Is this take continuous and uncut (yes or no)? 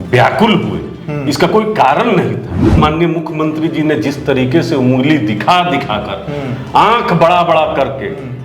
no